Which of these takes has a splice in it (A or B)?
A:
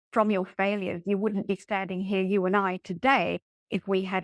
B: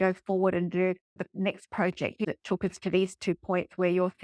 B